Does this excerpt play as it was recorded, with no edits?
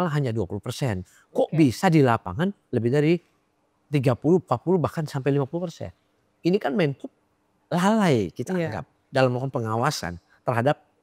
yes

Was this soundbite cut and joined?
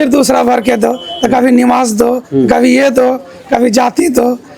no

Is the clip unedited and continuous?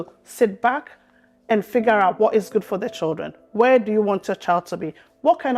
yes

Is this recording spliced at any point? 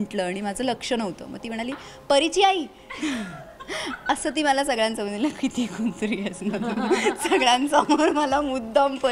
no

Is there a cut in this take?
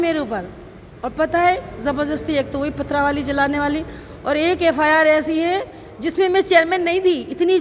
no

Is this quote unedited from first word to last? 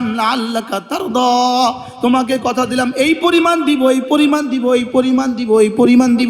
yes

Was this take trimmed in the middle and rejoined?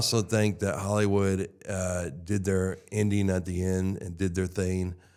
no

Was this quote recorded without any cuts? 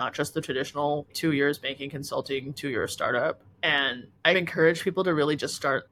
yes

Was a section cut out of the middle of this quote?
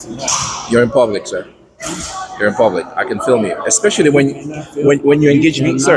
no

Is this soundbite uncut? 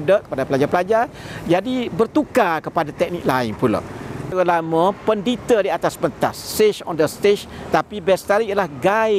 no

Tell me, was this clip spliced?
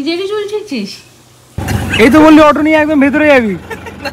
yes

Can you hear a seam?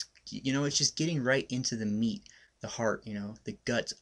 no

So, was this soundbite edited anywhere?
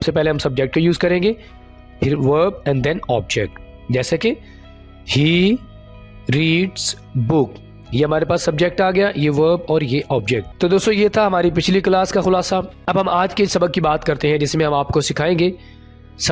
yes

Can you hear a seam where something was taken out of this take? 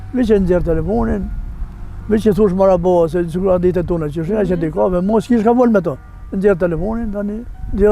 no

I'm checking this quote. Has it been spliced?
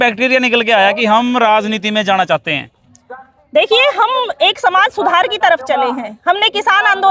no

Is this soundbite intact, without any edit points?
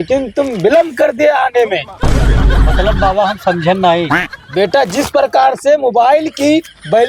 yes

